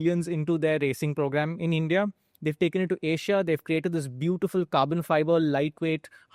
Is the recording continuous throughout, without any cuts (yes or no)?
yes